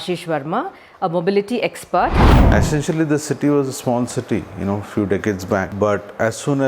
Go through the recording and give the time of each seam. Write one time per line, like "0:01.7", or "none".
0:02.3
0:05.7

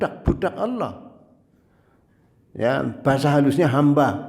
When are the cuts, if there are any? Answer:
none

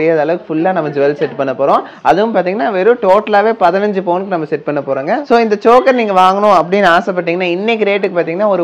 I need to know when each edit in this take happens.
0:05.2

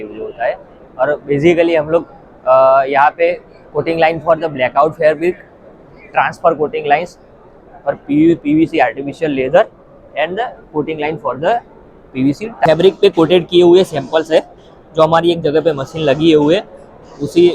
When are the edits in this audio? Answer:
0:12.7

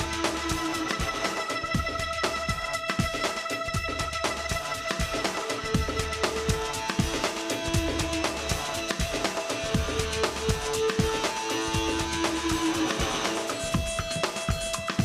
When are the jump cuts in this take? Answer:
0:13.6

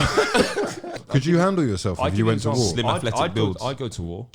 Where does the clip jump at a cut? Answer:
0:00.9

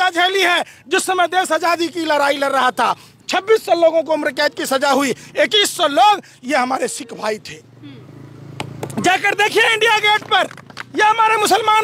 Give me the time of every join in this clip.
none

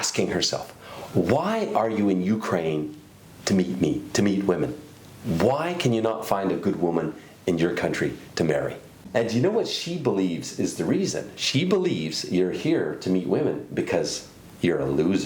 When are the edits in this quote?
0:09.0

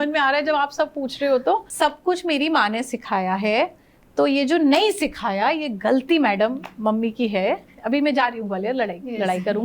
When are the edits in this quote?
0:01.7

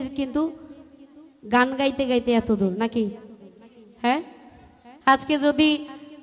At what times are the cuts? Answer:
none

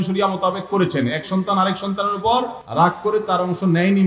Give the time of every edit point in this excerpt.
0:02.6

